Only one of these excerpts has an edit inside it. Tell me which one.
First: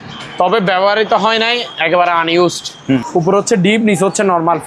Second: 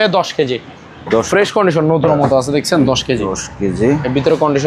first; 1 cut; at 3.0 s

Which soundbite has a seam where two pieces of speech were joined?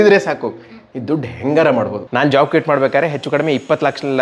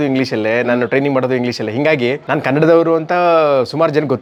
first; 1 cut; at 2.0 s

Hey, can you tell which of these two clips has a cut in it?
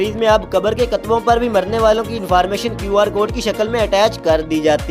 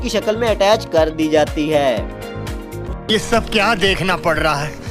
second; 1 cut; at 2.9 s

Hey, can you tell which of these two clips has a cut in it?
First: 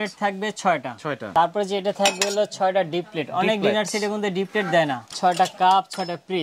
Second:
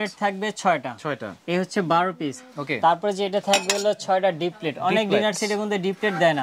first; 2 cuts; at 1.3 s, 5.1 s

